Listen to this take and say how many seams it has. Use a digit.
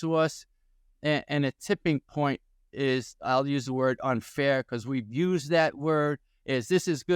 0